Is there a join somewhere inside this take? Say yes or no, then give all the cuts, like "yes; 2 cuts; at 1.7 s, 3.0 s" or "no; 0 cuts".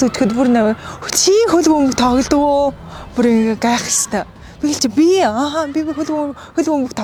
no; 0 cuts